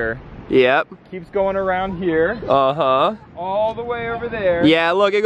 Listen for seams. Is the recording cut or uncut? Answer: uncut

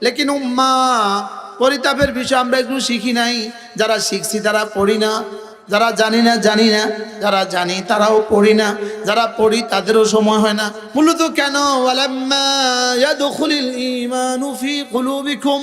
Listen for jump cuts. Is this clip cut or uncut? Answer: cut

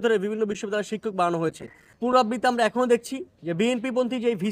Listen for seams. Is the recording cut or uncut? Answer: cut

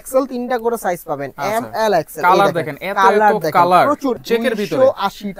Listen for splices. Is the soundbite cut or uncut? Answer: cut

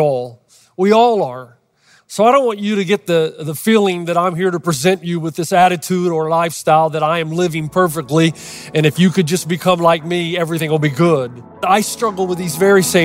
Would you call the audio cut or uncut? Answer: cut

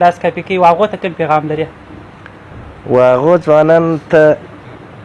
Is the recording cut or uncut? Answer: uncut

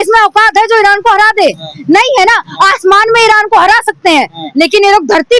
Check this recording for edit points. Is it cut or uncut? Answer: uncut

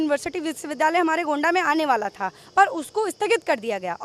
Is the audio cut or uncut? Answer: uncut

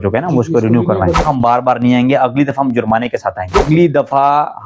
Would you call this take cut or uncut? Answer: cut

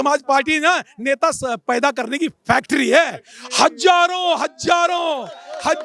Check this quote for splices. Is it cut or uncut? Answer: uncut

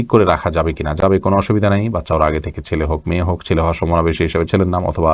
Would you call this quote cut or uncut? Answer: uncut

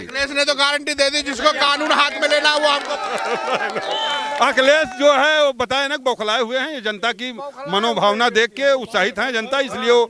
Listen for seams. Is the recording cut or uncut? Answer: uncut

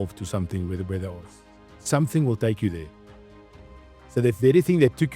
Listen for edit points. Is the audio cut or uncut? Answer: uncut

